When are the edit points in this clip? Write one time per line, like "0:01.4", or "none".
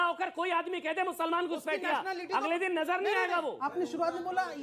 0:03.6